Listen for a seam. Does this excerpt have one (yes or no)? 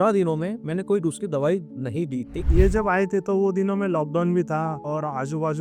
yes